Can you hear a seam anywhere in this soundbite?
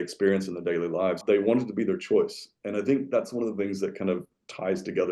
yes; 1 cut; at 1.2 s

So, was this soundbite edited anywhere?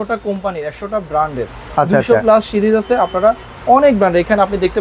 no; 0 cuts

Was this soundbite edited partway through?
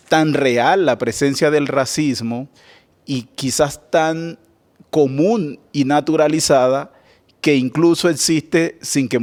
no; 0 cuts

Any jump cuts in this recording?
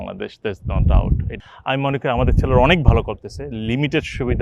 yes; 1 cut; at 1.3 s

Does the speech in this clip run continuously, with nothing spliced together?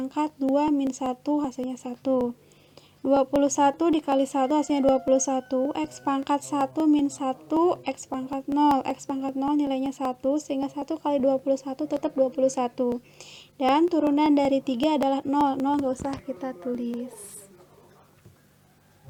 yes; 0 cuts

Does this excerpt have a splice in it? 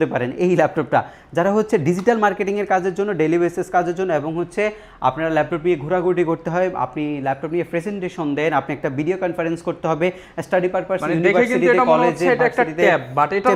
no; 0 cuts

